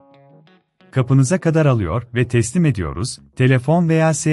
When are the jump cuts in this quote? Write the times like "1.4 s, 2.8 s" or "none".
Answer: 0.9 s